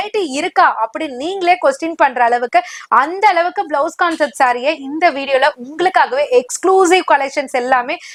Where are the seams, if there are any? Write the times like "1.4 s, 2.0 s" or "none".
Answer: none